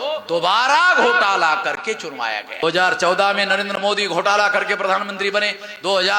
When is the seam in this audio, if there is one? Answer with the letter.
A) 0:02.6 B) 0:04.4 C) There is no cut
A